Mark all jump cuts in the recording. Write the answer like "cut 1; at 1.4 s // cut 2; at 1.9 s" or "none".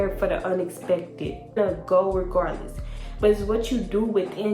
cut 1; at 1.6 s